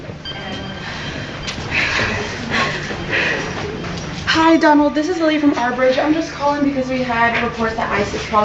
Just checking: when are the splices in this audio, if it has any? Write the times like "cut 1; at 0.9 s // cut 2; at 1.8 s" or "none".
cut 1; at 4.5 s